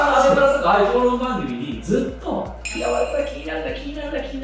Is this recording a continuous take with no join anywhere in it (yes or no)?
no